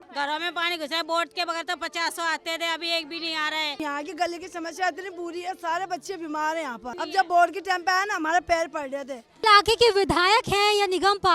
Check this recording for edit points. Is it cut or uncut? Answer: cut